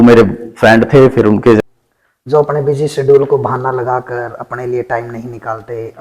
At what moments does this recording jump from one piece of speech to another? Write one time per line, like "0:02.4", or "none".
0:01.6